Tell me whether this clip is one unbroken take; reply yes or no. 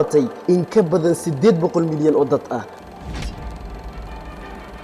yes